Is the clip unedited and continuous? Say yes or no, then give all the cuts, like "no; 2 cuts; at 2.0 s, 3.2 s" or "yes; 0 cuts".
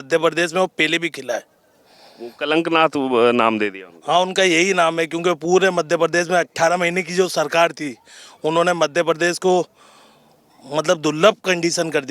yes; 0 cuts